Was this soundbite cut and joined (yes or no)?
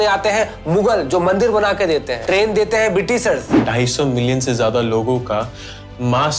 yes